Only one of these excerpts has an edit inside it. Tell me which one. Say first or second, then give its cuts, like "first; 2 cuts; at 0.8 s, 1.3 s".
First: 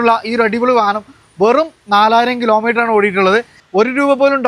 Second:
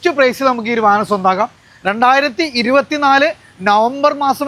first; 1 cut; at 3.5 s